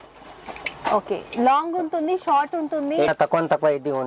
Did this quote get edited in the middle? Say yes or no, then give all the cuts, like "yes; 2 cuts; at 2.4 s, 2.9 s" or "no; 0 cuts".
yes; 1 cut; at 3.1 s